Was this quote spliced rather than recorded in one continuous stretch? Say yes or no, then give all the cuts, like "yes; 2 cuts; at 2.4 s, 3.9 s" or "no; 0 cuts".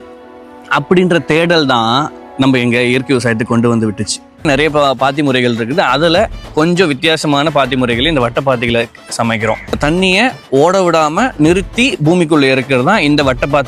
yes; 2 cuts; at 4.4 s, 9.8 s